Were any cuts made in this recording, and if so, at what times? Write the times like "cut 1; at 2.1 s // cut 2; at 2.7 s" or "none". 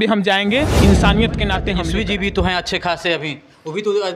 cut 1; at 1.8 s